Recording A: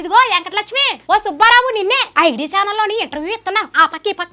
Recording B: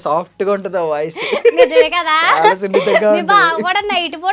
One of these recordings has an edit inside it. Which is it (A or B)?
A